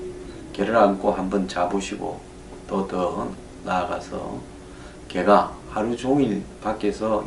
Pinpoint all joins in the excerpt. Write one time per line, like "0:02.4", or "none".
0:04.2